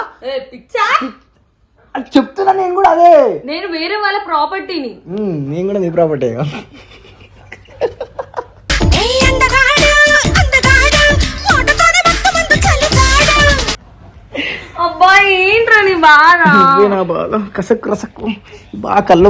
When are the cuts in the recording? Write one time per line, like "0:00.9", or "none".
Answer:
none